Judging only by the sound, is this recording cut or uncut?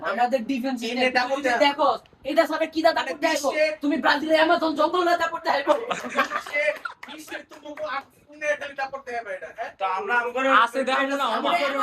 uncut